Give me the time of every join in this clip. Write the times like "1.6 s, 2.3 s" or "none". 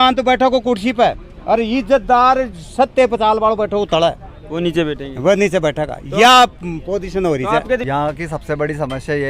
7.8 s